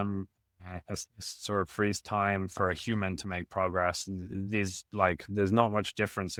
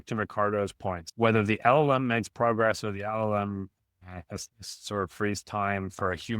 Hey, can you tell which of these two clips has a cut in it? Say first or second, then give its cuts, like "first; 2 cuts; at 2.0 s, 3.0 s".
second; 1 cut; at 1.0 s